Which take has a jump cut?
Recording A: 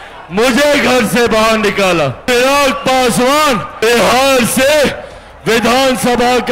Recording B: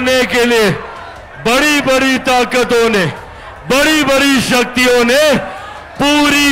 A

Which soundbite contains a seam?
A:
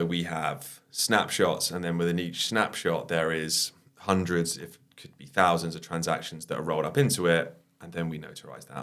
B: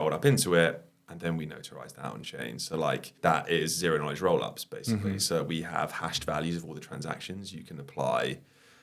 B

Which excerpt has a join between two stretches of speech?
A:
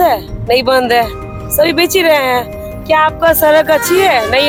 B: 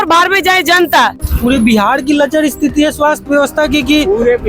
B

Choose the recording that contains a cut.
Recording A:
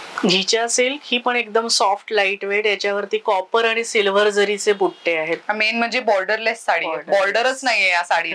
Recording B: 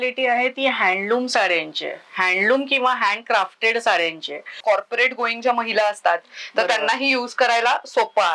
B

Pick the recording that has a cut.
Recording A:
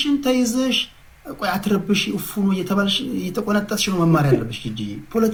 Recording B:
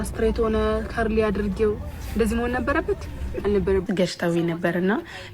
B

